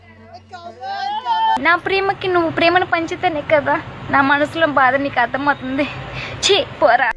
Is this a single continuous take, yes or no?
yes